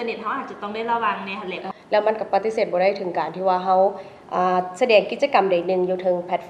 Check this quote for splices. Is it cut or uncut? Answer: cut